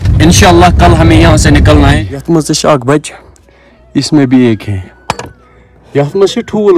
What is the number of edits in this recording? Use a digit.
1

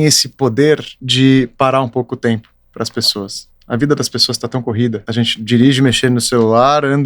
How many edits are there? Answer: 2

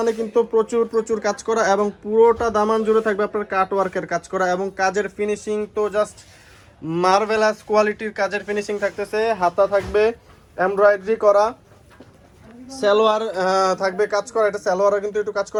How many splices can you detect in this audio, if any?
0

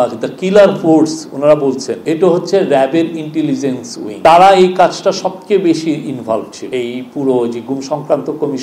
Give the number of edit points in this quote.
0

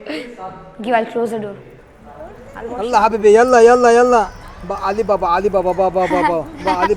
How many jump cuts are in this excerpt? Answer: 1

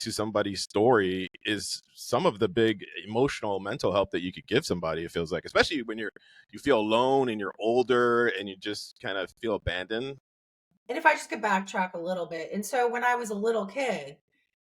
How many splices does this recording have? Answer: 1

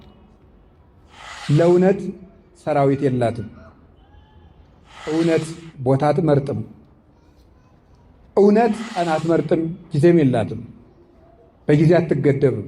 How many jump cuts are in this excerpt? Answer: 3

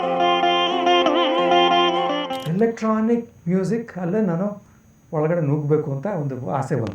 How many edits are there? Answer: 1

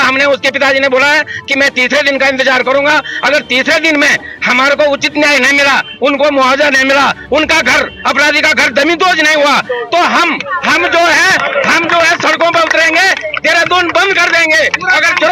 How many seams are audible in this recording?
0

